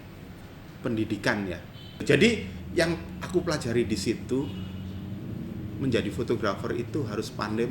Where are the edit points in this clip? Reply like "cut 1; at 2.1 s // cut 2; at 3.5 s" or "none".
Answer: cut 1; at 2.0 s